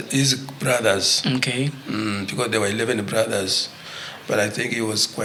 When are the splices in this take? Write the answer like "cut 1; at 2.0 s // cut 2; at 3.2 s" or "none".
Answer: none

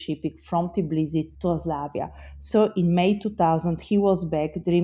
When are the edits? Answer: cut 1; at 1.3 s

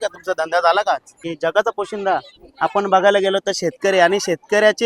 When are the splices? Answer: cut 1; at 1.3 s

